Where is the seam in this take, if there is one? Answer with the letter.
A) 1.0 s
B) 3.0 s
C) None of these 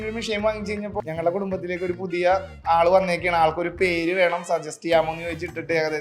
A